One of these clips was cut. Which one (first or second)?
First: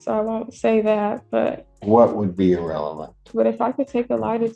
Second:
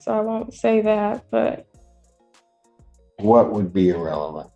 first